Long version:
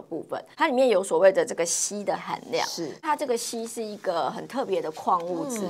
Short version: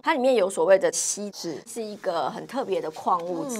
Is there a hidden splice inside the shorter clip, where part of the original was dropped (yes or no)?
yes